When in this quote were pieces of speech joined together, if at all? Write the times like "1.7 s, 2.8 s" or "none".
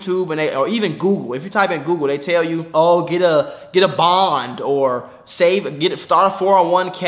2.6 s